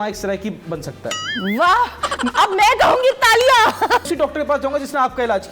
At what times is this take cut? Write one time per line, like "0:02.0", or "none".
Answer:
0:04.1